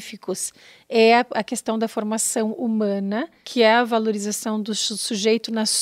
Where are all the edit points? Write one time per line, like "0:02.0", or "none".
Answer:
0:03.4